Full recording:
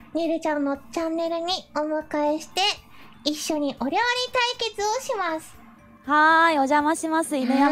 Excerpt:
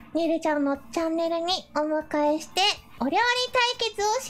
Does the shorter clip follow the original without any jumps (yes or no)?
no